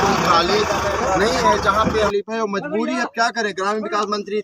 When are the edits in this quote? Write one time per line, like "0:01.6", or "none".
0:02.1